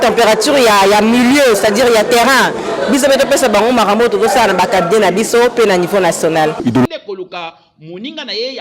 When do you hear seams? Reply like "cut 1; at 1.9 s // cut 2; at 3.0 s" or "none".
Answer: cut 1; at 6.9 s